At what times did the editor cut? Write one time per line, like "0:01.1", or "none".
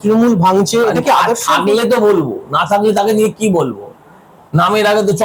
none